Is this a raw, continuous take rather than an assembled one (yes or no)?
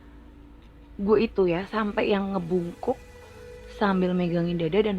no